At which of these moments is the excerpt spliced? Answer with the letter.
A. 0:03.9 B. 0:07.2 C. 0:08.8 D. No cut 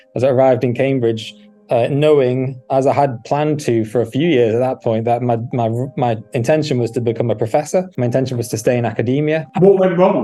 D